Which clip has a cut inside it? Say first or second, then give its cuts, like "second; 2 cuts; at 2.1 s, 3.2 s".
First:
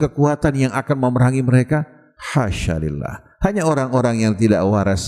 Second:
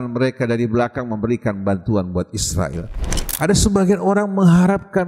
second; 1 cut; at 3.2 s